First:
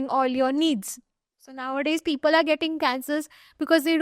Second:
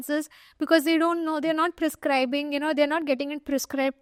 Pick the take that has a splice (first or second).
first